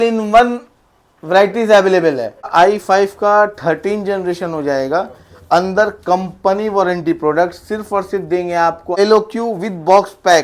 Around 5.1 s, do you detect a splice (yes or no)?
no